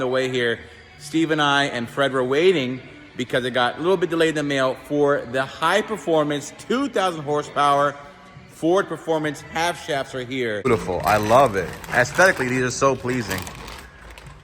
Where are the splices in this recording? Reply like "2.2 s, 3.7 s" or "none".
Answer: 10.7 s